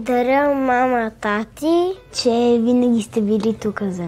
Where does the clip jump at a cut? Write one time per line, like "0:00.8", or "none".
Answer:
0:02.0